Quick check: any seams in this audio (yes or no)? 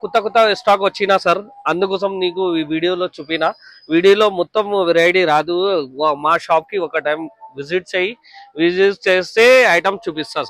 no